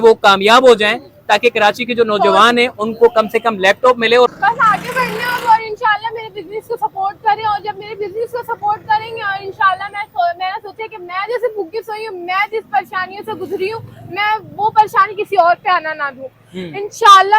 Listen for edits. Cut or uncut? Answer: cut